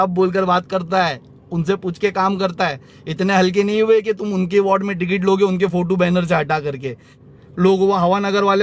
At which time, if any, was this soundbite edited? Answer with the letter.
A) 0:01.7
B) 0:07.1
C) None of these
B